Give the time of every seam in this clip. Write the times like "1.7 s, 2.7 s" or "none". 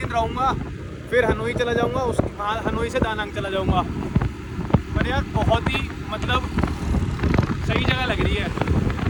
none